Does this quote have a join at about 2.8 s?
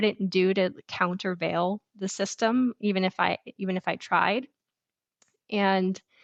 no; 0 cuts

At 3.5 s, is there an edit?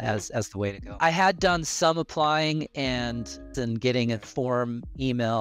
yes; 2 cuts; at 1.0 s, 3.5 s

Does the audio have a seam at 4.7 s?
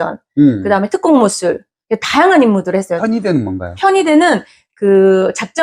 no; 1 cut; at 2.9 s

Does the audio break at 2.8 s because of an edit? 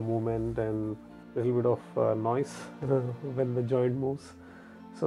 no; 1 cut; at 1.1 s

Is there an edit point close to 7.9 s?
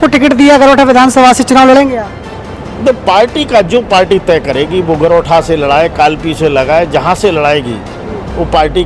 no; 0 cuts

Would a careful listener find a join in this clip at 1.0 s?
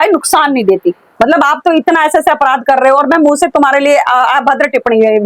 yes; 1 cut; at 1.0 s

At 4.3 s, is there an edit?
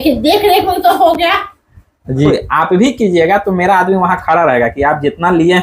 no; 1 cut; at 2.3 s

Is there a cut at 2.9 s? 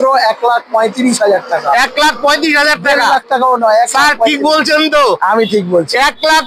no; 0 cuts

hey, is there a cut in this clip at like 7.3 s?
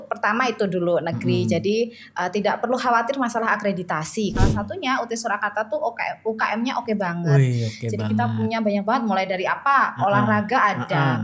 no; 1 cut; at 4.3 s

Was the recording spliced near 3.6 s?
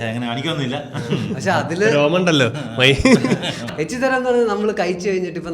yes; 1 cut; at 3.6 s

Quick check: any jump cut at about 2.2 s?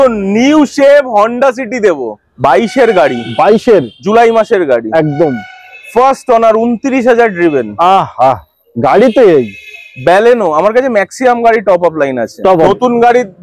yes; 2 cuts; at 2.2 s, 12.7 s

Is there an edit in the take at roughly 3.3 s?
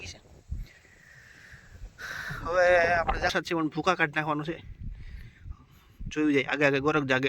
yes; 1 cut; at 3.3 s

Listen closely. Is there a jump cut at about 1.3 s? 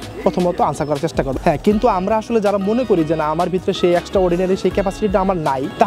yes; 1 cut; at 1.3 s

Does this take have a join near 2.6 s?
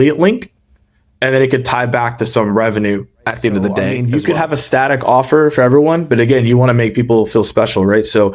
no; 1 cut; at 4.0 s

